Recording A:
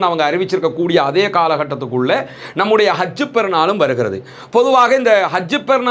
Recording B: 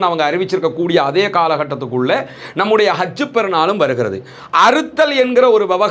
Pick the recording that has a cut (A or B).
B